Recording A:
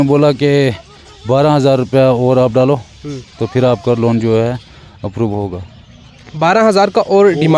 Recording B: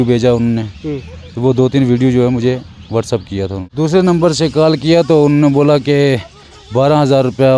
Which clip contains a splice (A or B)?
B